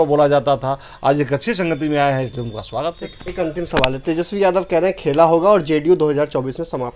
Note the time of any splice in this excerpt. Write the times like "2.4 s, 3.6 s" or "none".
none